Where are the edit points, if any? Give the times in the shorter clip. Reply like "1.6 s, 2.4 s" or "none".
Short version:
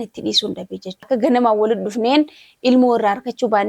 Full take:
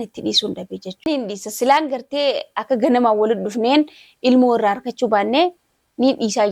0.9 s